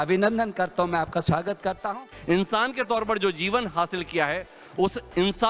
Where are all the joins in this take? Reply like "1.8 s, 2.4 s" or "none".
2.1 s